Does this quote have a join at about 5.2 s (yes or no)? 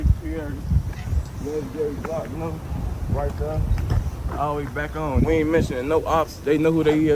yes